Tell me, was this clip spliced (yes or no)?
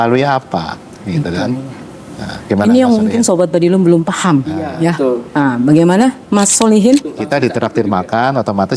yes